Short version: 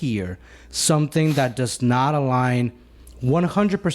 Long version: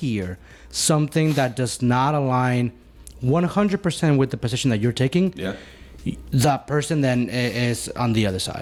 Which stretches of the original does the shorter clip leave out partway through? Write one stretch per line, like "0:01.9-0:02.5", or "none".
none